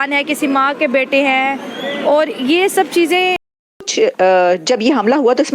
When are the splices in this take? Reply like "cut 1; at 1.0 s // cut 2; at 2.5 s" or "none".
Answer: cut 1; at 3.6 s